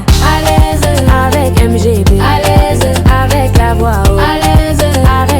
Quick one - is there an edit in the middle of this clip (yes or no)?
no